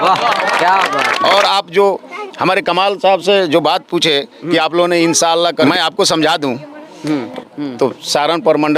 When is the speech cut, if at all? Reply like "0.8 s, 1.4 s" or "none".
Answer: 1.2 s, 5.6 s, 7.7 s